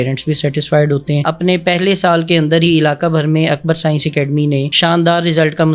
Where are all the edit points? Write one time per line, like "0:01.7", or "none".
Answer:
0:01.2